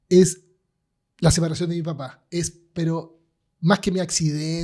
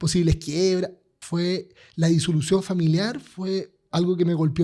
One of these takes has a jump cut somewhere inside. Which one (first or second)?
second